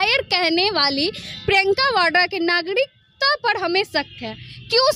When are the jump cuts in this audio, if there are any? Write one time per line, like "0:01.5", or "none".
none

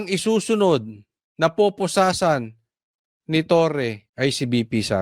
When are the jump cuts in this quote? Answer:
0:04.1

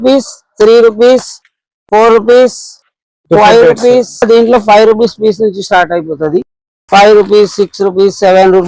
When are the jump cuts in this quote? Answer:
0:04.2

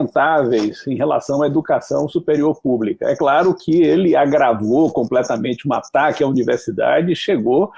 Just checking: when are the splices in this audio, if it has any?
none

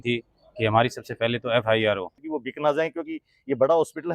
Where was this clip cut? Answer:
0:02.2

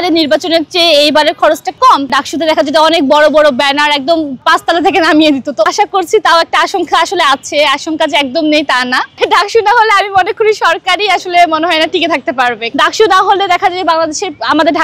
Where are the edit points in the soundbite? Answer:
0:02.1
0:05.7
0:09.2
0:12.7

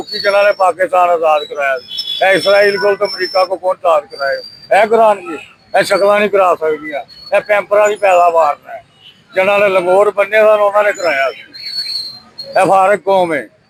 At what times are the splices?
none

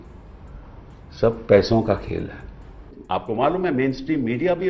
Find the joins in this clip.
0:03.2

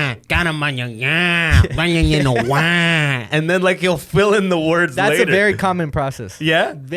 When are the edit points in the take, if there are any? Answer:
none

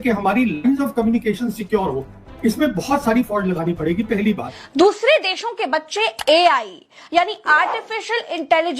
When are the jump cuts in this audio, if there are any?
0:04.6

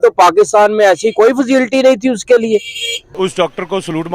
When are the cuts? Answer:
0:03.0

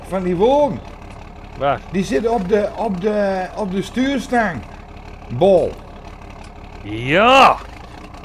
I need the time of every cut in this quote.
none

